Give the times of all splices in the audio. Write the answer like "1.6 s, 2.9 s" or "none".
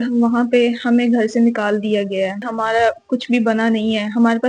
2.5 s